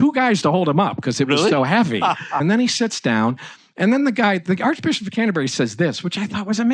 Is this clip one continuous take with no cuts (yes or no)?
no